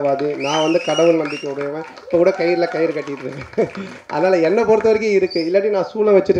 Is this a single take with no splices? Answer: yes; 0 cuts

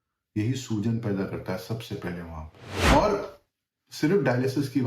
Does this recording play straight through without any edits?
no; 1 cut; at 2.7 s

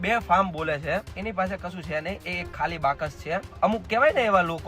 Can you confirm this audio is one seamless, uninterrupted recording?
no; 2 cuts; at 1.2 s, 3.6 s

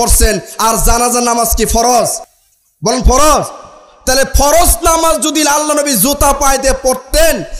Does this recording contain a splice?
no; 0 cuts

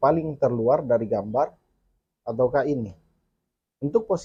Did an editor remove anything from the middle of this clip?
no; 0 cuts

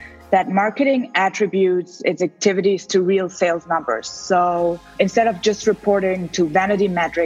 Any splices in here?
yes; 1 cut; at 4.8 s

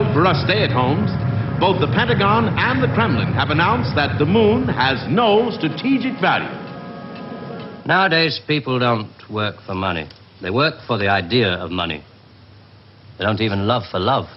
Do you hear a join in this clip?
yes; 1 cut; at 7.7 s

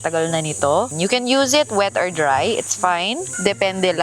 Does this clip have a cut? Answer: yes; 1 cut; at 0.9 s

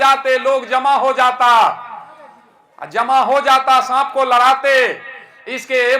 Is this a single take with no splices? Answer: yes; 0 cuts

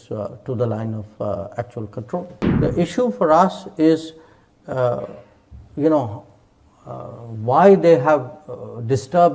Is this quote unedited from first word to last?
no; 1 cut; at 2.4 s

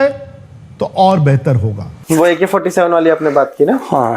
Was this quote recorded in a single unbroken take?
no; 1 cut; at 2.4 s

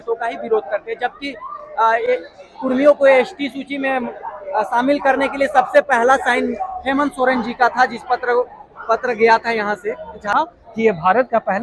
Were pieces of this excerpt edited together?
yes; 1 cut; at 10.3 s

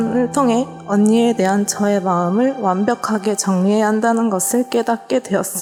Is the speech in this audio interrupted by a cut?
no; 0 cuts

